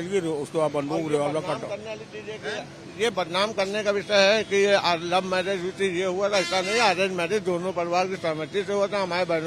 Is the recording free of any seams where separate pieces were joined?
yes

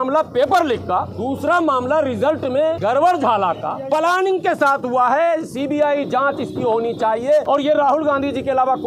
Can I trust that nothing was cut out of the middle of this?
no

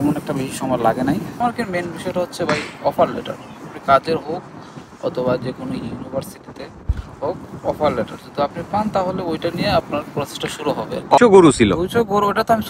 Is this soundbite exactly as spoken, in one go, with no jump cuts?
no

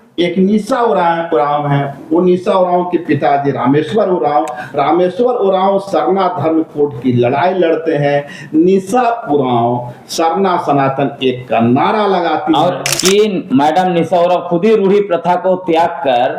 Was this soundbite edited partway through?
yes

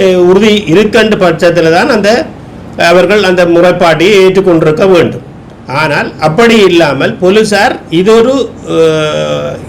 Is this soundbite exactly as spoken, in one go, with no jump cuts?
yes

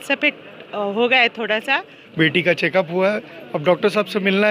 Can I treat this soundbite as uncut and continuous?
no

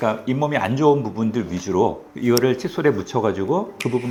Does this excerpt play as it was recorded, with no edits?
yes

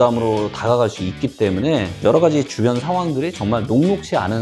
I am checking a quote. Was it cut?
yes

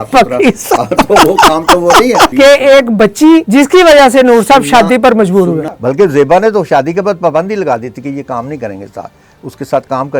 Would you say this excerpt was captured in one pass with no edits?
no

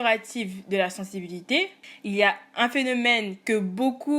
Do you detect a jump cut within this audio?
yes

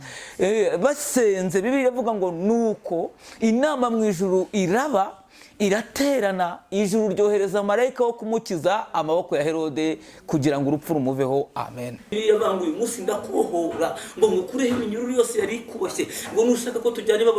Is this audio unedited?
no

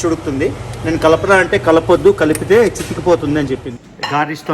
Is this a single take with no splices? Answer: no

